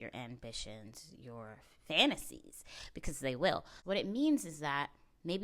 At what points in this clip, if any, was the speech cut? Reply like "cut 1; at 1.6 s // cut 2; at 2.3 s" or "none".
cut 1; at 3.7 s